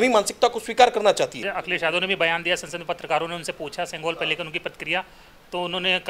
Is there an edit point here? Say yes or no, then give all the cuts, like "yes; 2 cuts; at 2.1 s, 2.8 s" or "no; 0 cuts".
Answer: yes; 1 cut; at 1.5 s